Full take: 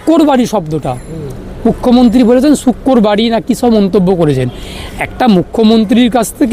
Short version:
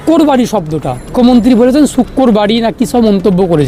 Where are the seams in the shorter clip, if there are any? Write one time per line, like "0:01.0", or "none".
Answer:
0:01.1